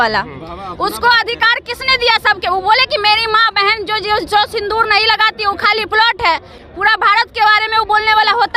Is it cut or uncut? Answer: uncut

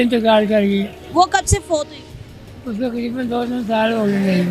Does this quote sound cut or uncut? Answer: uncut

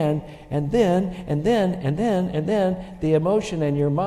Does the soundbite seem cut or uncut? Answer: uncut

